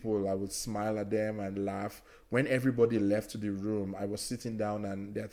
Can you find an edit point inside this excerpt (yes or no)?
no